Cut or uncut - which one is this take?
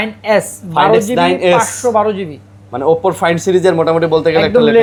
uncut